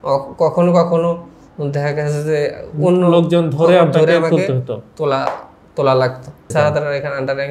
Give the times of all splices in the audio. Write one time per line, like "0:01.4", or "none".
0:06.5